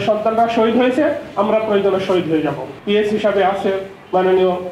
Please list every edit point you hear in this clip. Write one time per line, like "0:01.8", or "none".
0:02.7